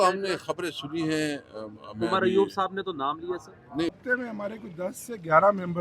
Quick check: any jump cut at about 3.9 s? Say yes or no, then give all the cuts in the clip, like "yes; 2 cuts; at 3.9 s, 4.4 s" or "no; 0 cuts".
yes; 1 cut; at 3.9 s